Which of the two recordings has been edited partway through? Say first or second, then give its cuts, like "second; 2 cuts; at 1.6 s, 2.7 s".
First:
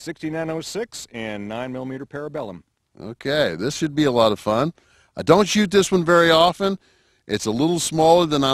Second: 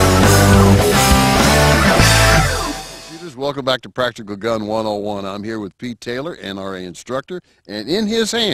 first; 1 cut; at 1.7 s